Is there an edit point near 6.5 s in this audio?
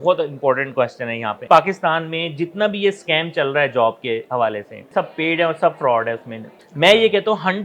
yes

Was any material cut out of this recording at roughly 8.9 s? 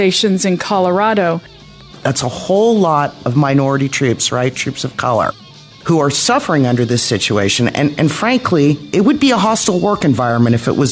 no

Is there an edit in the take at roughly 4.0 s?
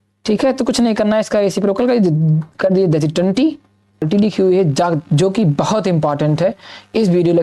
yes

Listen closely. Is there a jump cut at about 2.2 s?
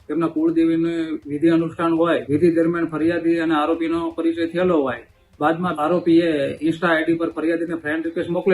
yes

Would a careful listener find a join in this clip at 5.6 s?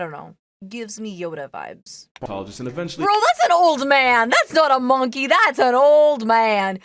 no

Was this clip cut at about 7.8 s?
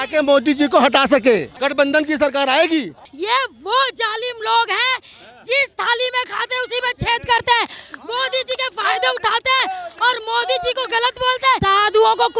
no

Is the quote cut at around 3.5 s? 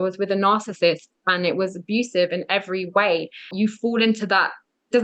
yes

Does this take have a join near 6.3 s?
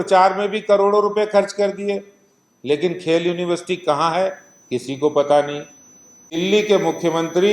yes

